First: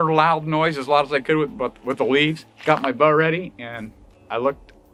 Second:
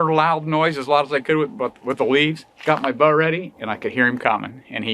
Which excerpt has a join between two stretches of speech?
second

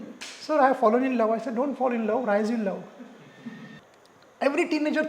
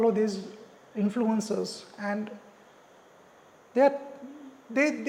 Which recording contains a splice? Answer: first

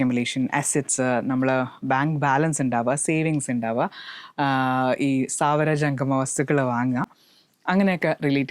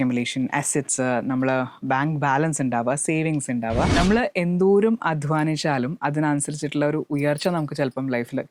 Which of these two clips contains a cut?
second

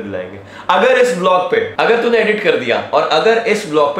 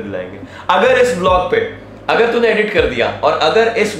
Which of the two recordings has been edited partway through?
first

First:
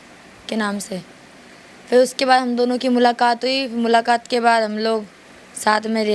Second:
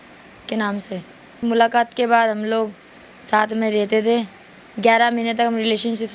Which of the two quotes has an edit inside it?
second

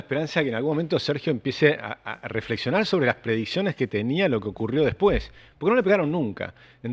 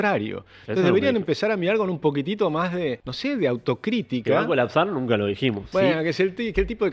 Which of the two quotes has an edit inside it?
second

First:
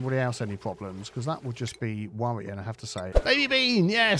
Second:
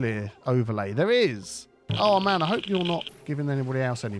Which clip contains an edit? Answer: first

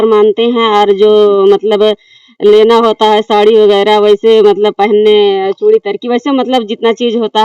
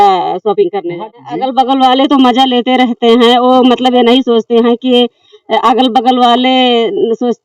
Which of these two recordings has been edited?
second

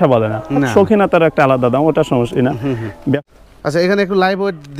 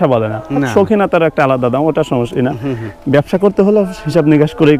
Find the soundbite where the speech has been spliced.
first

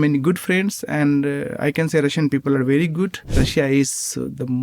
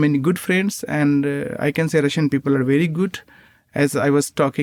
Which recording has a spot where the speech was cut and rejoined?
first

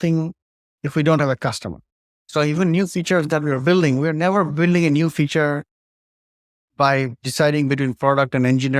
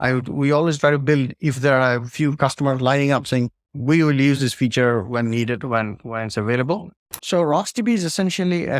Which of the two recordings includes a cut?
second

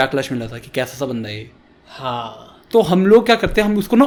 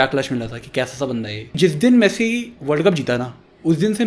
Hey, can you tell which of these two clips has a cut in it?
second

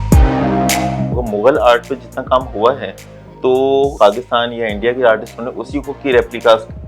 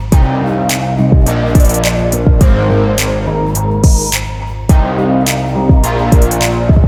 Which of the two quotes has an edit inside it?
first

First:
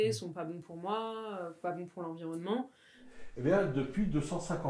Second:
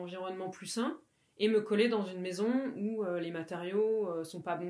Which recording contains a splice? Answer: first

